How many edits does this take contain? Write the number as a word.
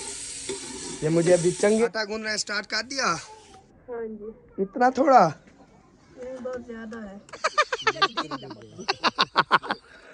two